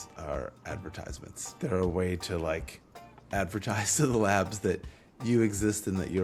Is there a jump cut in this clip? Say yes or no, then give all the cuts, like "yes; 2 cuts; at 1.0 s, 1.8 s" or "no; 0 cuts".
no; 0 cuts